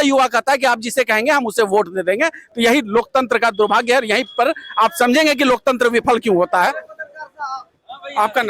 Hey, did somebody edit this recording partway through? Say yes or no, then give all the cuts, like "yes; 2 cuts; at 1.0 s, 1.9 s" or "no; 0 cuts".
no; 0 cuts